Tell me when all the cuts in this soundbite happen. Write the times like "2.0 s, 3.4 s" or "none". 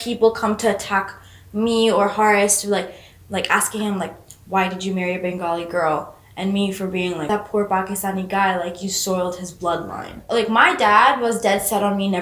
7.3 s, 10.2 s